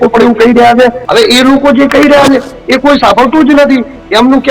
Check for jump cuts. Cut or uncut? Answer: cut